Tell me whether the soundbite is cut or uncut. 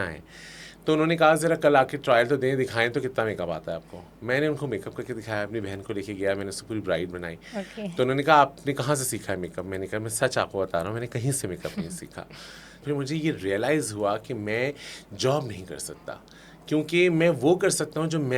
cut